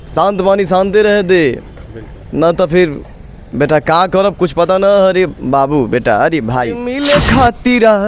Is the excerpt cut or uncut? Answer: cut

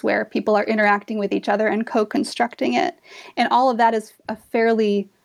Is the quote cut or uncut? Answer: uncut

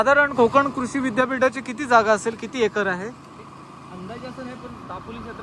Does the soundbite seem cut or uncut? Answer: uncut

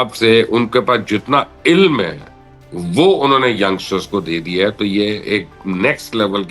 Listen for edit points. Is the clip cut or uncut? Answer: uncut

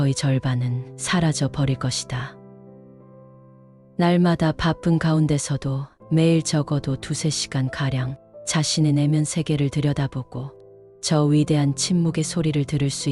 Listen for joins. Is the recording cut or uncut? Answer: cut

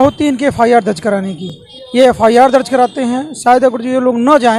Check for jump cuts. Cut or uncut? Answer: uncut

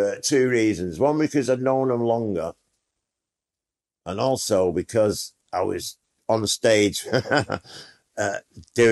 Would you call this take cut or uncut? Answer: uncut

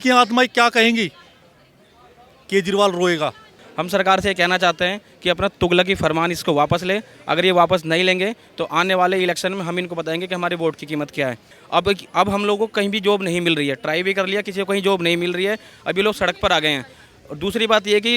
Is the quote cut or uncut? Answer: cut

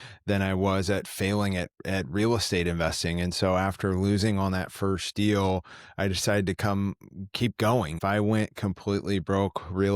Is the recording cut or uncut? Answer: cut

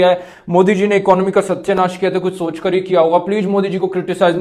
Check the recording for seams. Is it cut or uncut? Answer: uncut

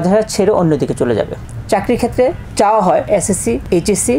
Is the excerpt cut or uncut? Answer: cut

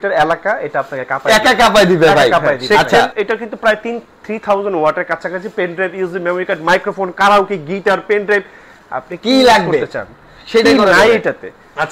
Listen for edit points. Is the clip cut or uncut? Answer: cut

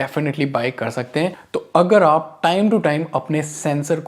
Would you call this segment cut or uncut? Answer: cut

